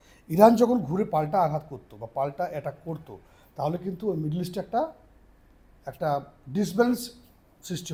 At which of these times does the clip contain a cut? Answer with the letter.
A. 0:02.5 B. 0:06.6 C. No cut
C